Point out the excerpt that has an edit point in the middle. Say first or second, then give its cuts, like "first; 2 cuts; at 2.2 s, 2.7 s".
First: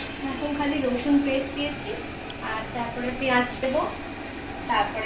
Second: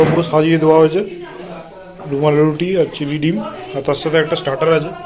first; 1 cut; at 3.6 s